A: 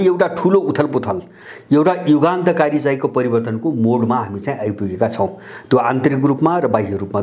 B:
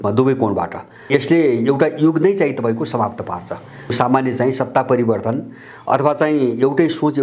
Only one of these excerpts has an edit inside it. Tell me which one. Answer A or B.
B